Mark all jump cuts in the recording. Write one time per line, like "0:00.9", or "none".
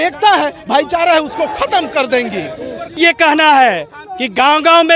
0:03.0